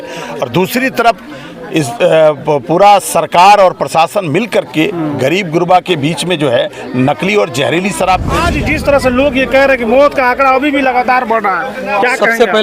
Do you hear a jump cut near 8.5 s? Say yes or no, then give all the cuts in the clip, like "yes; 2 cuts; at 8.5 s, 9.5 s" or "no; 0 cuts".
yes; 1 cut; at 8.5 s